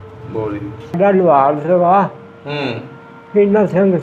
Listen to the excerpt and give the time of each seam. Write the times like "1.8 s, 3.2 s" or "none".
1.0 s